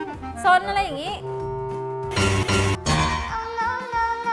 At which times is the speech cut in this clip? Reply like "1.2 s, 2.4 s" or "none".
1.7 s